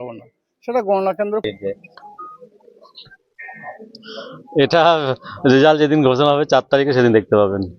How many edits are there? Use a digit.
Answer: 1